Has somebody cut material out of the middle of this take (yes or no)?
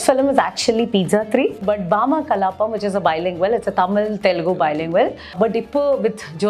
yes